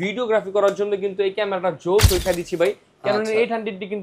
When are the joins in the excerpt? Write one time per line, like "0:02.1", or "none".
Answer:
0:02.2